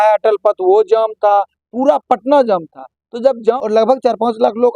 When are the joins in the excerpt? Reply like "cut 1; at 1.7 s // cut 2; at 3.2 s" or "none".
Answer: cut 1; at 3.6 s